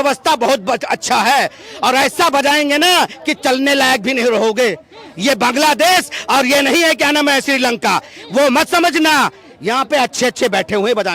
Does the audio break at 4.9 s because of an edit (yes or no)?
no